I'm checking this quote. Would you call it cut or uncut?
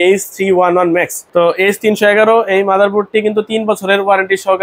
uncut